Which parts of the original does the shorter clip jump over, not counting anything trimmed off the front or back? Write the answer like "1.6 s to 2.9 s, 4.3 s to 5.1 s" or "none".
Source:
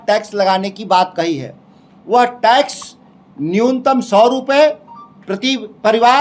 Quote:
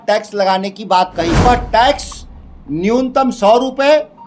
1.5 s to 2.2 s